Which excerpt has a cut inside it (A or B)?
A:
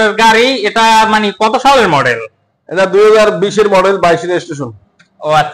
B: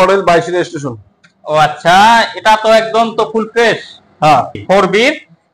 B